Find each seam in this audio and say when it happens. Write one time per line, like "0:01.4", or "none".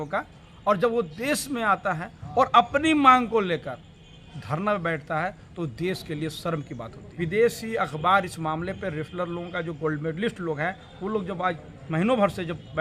0:07.0